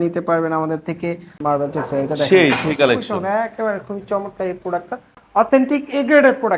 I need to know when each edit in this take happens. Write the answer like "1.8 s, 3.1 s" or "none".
1.4 s, 5.1 s